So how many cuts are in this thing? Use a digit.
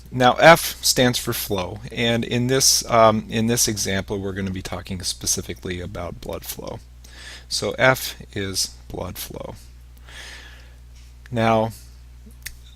1